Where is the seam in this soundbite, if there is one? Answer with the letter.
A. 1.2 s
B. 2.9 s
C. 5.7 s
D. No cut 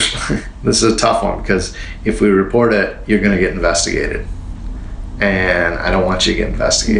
D